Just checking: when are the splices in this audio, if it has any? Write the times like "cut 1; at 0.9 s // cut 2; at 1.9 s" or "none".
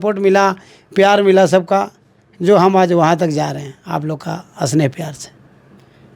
none